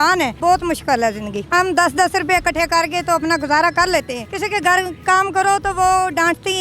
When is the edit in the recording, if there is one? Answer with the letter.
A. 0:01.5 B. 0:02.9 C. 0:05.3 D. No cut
A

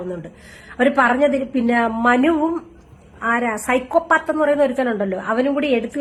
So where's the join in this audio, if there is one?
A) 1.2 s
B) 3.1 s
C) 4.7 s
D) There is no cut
D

